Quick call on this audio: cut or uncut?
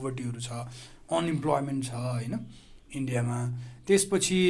uncut